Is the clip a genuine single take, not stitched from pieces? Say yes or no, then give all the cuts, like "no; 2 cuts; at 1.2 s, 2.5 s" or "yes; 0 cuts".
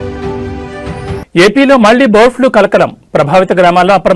no; 1 cut; at 1.2 s